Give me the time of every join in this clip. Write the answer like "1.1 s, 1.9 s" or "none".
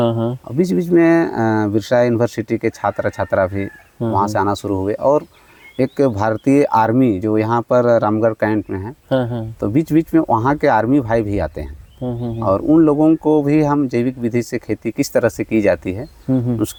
none